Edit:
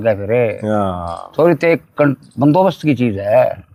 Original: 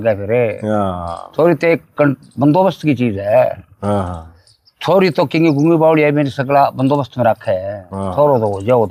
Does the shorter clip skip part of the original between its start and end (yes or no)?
no